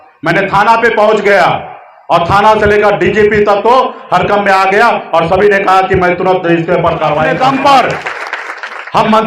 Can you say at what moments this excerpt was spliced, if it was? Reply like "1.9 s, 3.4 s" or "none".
7.3 s

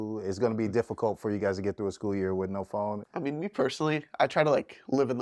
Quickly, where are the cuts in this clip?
3.0 s

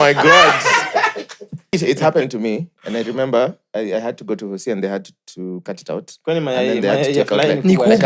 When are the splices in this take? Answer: 1.7 s

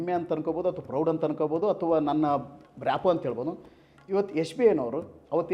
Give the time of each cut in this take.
none

